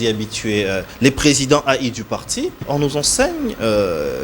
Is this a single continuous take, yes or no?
no